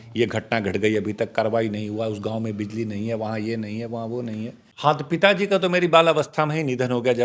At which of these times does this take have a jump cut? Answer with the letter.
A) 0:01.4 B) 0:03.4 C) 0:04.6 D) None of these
C